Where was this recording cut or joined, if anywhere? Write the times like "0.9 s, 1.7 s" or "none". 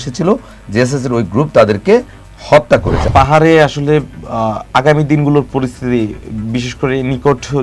3.1 s

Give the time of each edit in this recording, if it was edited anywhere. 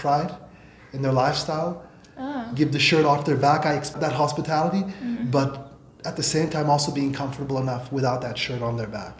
3.9 s

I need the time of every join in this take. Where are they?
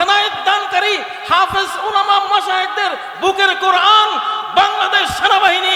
none

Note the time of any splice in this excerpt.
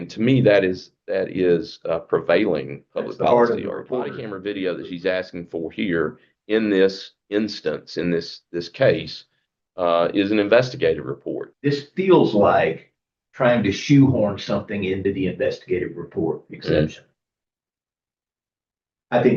4.2 s, 11.4 s

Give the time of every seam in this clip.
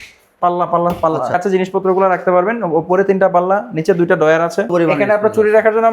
1.3 s, 4.7 s

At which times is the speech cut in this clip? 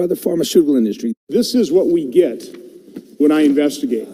1.2 s

